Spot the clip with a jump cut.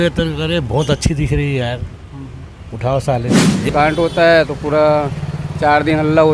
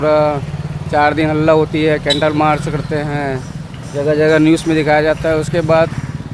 first; 1 cut; at 3.7 s

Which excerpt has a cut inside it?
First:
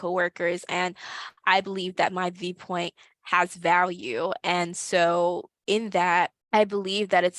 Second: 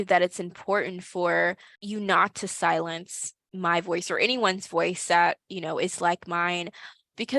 first; 1 cut; at 5.5 s

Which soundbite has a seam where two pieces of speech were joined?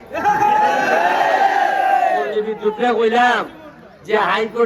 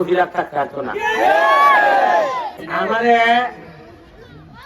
second; 1 cut; at 2.7 s

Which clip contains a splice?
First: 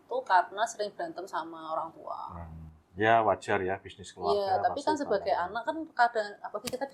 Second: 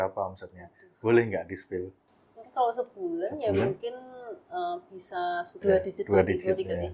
second; 2 cuts; at 2.0 s, 5.6 s

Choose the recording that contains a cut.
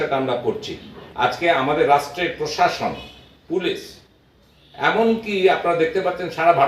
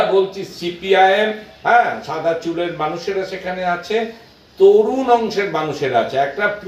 first; 1 cut; at 1.0 s

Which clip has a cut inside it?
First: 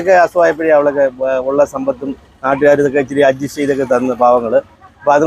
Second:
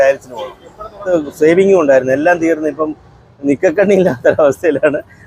second; 1 cut; at 1.1 s

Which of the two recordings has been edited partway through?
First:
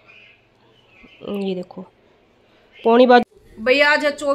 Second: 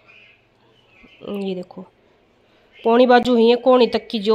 first; 1 cut; at 3.2 s

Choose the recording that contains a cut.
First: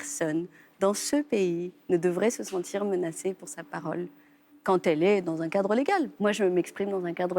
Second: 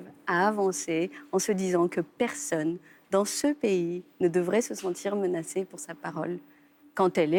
first; 1 cut; at 6.1 s

